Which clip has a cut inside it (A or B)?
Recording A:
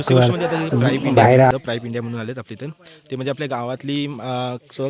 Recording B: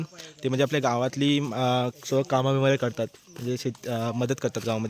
A